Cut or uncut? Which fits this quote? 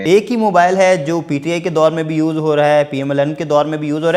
uncut